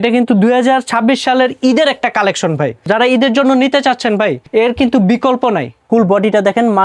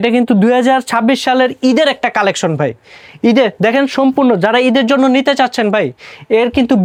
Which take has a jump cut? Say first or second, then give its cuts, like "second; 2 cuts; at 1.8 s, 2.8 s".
first; 3 cuts; at 2.9 s, 4.4 s, 5.7 s